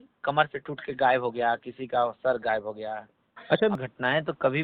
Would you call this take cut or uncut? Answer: cut